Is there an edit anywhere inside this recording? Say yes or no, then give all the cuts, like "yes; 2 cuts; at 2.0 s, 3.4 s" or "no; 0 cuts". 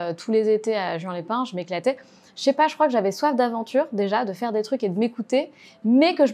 no; 0 cuts